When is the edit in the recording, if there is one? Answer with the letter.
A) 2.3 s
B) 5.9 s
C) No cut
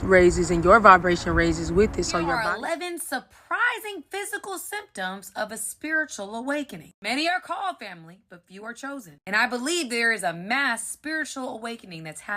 A